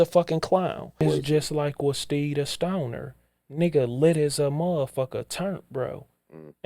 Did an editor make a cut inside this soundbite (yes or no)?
yes